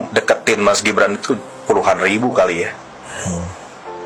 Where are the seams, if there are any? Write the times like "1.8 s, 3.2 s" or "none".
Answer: none